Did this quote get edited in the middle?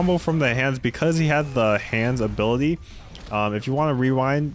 no; 0 cuts

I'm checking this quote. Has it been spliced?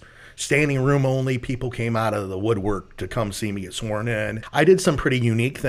yes; 1 cut; at 4.1 s

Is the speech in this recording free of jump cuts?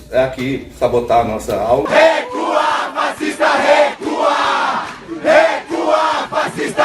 no; 1 cut; at 1.9 s

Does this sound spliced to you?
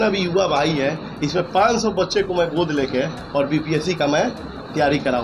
no; 0 cuts

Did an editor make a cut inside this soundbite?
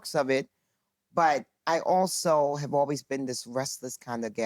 no; 0 cuts

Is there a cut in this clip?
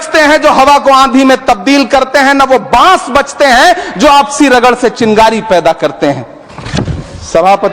no; 0 cuts

